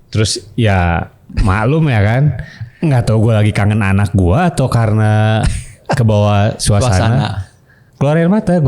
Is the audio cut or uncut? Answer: uncut